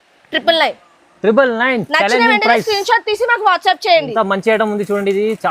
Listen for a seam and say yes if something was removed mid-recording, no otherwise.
no